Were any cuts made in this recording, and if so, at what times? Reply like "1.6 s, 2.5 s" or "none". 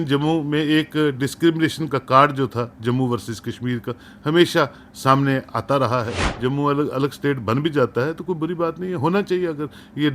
6.2 s